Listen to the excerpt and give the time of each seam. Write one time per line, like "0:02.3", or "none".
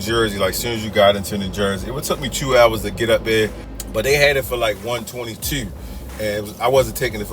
0:06.0